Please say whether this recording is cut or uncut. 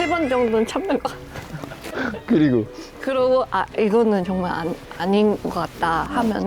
uncut